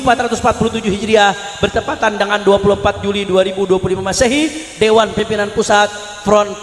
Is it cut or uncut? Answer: uncut